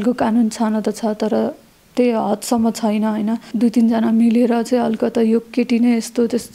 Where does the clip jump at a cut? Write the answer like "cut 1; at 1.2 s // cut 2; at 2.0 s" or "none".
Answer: cut 1; at 3.5 s